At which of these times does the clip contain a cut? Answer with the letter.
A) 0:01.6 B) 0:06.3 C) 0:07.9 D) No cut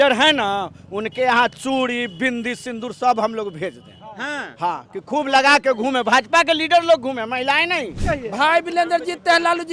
C